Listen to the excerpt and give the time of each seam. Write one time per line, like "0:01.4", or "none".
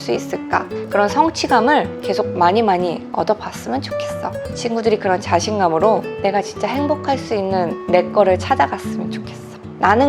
0:06.1